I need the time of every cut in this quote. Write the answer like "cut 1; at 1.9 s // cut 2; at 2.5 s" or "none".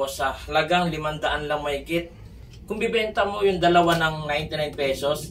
none